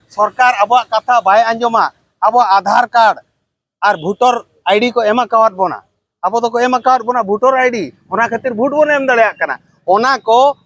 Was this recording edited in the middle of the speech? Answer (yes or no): no